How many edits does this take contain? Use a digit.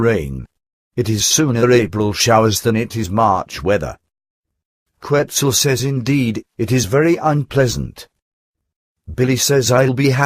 1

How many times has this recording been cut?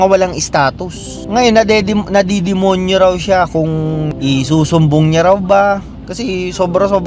2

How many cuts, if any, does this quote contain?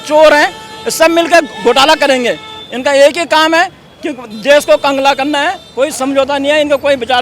1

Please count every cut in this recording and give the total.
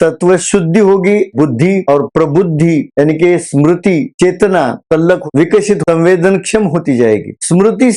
2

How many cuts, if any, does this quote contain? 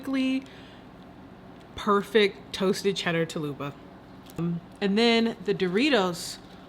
1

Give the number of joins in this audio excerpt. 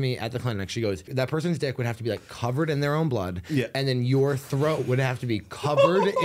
1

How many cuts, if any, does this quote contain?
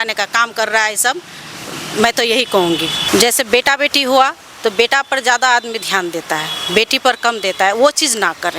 1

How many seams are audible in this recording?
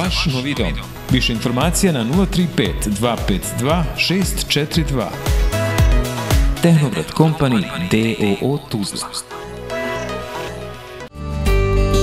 1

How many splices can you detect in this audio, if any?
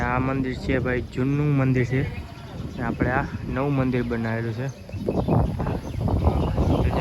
0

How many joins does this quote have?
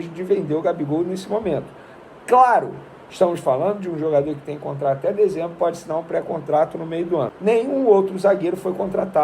1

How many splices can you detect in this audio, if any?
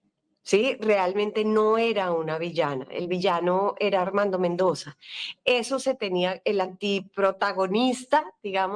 0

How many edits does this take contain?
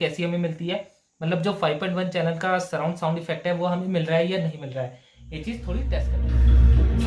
1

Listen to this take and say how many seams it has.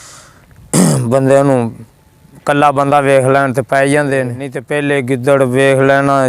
1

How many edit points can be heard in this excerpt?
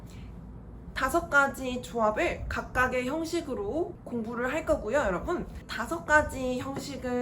2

